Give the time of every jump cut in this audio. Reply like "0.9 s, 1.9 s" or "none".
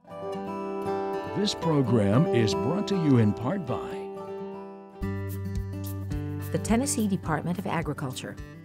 1.5 s